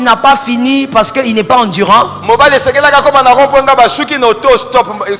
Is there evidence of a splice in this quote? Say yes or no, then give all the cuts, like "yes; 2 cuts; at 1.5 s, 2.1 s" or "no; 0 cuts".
no; 0 cuts